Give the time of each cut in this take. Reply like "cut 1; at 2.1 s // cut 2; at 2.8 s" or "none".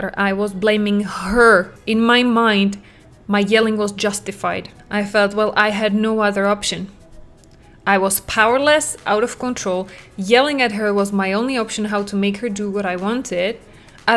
cut 1; at 1.8 s // cut 2; at 4.7 s